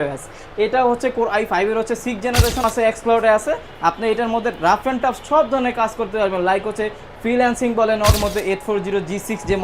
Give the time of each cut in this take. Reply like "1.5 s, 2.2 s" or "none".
2.6 s, 8.2 s

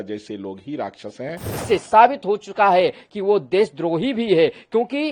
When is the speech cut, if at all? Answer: 1.5 s

